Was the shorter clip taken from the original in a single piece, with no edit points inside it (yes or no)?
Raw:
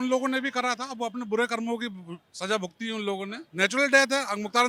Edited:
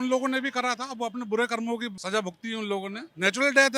no